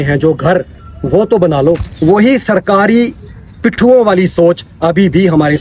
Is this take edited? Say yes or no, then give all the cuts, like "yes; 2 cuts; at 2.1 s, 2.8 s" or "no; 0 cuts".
yes; 1 cut; at 1.9 s